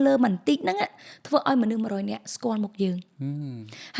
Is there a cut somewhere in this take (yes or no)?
no